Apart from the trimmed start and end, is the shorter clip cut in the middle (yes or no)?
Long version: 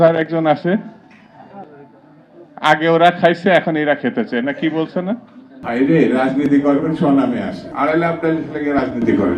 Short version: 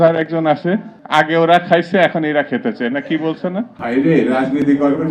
yes